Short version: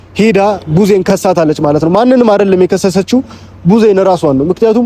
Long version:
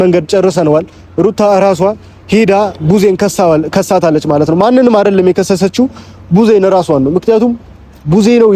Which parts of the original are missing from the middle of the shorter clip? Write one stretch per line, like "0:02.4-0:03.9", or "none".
0:03.2-0:03.7